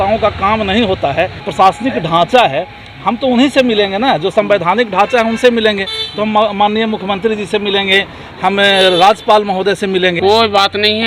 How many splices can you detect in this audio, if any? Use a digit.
2